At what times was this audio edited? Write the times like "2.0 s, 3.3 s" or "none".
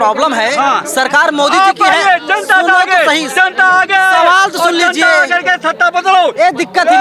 none